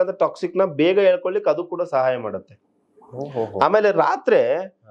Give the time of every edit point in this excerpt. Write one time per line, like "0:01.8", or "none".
none

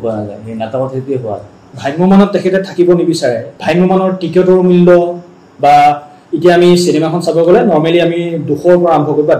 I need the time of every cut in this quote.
0:01.8
0:03.5

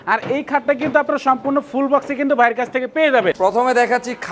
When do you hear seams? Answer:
none

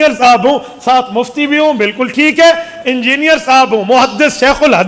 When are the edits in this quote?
none

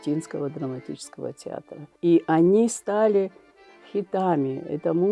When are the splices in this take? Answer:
0:01.8

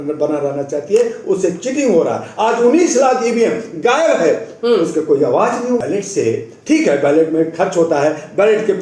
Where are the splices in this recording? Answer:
0:05.8

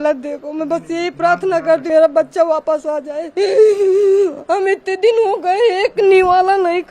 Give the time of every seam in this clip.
0:01.8

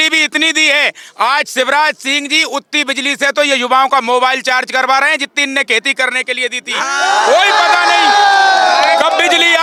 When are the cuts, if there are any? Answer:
none

